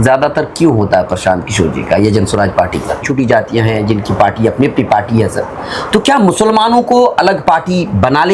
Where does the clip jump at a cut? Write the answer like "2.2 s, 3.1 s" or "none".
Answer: 3.0 s